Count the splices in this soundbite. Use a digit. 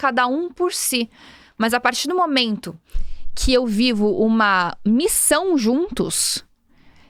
0